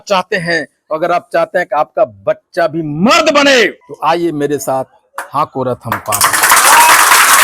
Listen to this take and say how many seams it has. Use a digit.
1